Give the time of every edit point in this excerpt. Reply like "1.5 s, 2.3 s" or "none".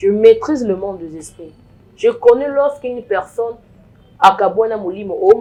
none